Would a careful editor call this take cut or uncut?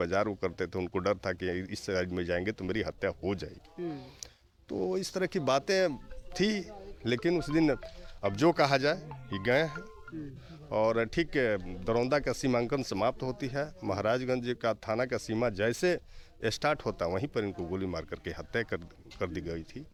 uncut